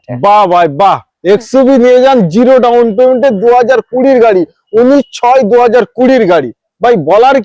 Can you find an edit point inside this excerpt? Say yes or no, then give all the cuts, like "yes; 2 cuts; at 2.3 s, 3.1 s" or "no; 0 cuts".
no; 0 cuts